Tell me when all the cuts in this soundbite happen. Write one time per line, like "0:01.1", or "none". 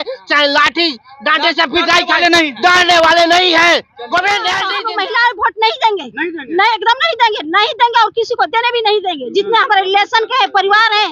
0:04.7